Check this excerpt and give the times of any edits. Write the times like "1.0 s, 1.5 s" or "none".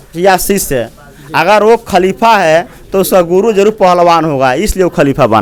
none